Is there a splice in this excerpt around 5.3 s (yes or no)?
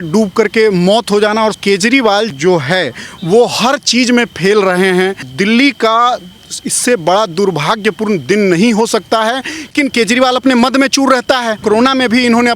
yes